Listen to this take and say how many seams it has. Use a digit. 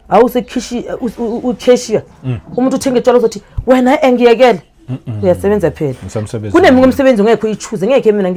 0